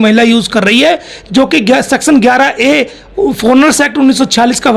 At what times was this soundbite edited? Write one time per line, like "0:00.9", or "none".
none